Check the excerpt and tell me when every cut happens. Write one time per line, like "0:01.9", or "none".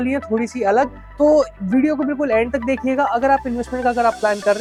none